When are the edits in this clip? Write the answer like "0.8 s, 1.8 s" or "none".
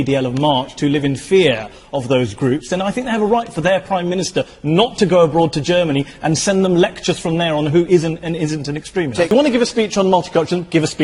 9.3 s